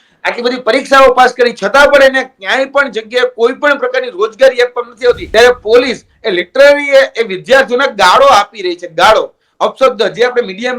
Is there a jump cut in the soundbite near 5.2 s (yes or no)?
yes